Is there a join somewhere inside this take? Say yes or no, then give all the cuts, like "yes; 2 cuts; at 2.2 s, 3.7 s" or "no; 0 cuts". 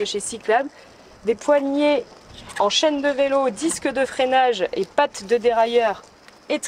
no; 0 cuts